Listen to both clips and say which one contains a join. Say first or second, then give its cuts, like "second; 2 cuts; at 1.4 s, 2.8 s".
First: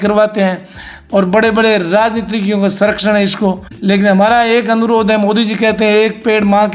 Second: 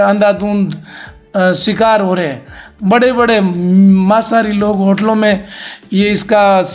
first; 1 cut; at 3.7 s